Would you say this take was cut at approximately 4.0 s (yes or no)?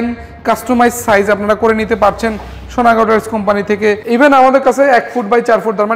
yes